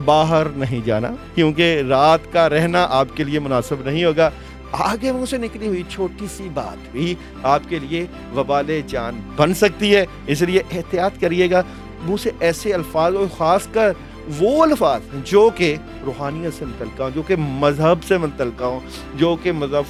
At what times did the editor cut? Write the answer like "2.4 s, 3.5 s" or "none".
none

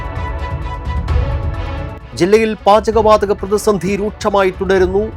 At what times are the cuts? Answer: none

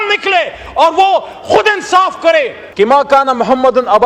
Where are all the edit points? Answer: 2.6 s

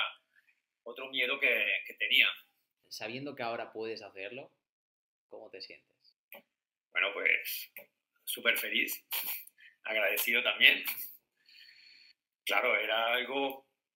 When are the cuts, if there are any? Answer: 2.8 s

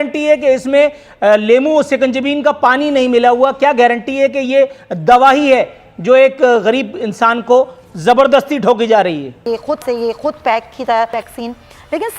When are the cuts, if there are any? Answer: 9.4 s, 11.2 s

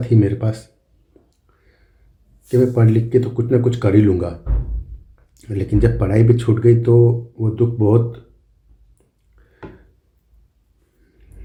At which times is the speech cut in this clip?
none

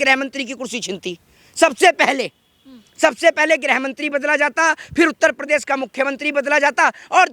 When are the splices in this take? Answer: none

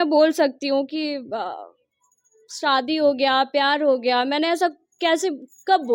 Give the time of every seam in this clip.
none

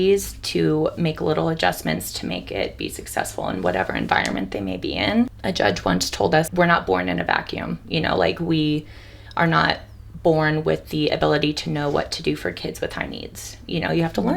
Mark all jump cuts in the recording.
5.4 s, 6.5 s

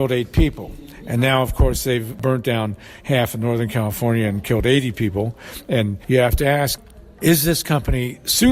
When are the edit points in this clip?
2.2 s, 6.0 s, 6.8 s

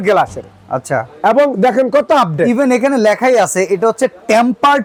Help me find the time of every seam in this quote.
none

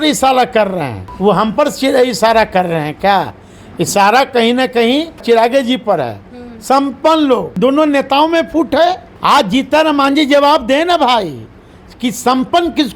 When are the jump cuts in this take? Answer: 1.0 s, 5.2 s, 7.6 s, 9.1 s

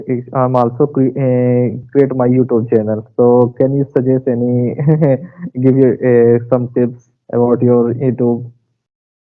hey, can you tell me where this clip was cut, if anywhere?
none

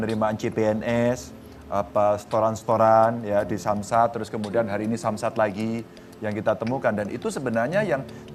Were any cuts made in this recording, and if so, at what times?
none

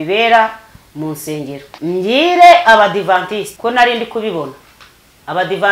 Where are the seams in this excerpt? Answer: 1.7 s, 3.5 s

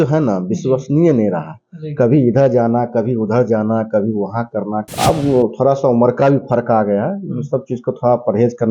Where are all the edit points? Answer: 4.8 s

